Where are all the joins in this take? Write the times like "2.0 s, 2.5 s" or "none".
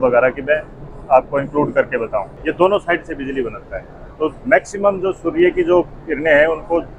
2.3 s